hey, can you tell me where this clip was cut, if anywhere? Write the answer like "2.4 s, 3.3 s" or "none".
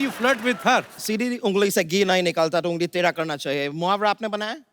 1.0 s